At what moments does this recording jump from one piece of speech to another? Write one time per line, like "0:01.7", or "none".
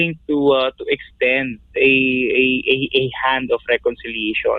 none